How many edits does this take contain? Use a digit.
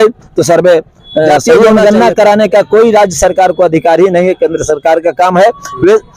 1